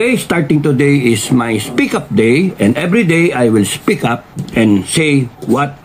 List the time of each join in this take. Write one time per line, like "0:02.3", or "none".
none

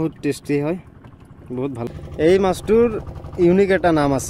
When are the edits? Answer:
0:01.9

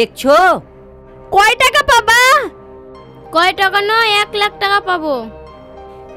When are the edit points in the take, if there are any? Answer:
none

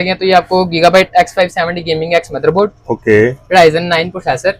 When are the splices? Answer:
none

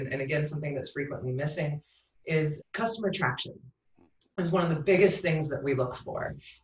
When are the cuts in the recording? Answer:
0:02.6

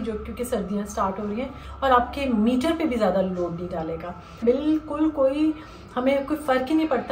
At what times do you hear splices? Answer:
0:01.6
0:04.4

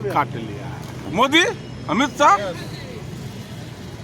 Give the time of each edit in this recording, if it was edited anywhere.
0:01.1

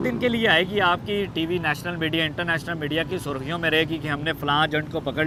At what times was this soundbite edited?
none

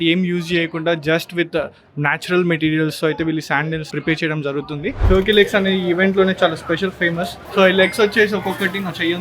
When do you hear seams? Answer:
0:03.9
0:05.0
0:07.3

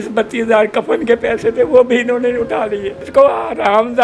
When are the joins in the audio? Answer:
0:03.0

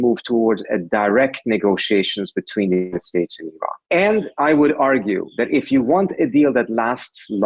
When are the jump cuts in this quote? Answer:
0:03.8

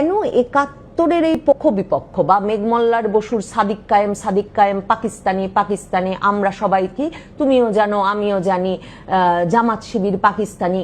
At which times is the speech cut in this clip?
0:01.5

